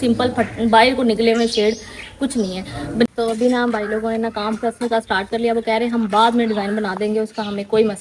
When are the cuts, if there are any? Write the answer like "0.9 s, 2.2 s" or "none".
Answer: 3.1 s